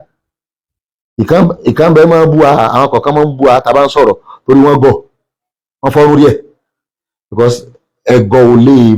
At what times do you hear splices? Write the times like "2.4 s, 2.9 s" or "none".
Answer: none